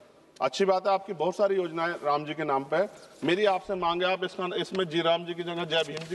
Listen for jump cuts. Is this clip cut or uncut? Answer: uncut